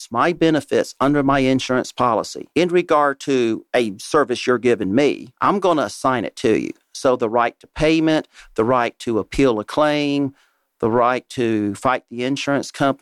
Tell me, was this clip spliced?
yes; 3 cuts; at 2.4 s, 3.6 s, 5.3 s

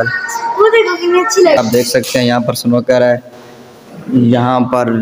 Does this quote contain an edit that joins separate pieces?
yes; 1 cut; at 1.6 s

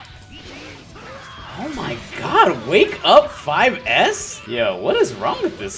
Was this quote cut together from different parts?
yes; 1 cut; at 4.3 s

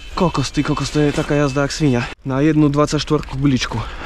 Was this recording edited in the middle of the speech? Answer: yes; 1 cut; at 2.2 s

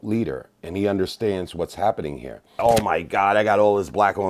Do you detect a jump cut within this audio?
yes; 1 cut; at 2.6 s

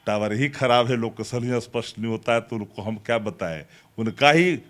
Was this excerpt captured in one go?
yes; 0 cuts

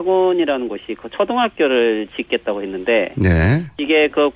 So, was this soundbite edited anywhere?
no; 0 cuts

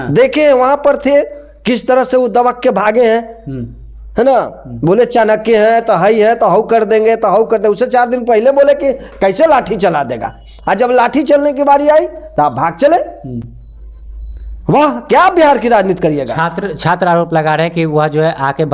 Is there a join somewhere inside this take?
no; 0 cuts

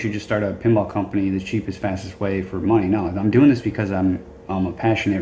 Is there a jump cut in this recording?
no; 0 cuts

